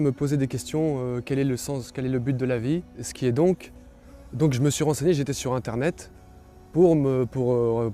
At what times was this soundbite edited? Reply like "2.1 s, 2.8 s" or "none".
3.0 s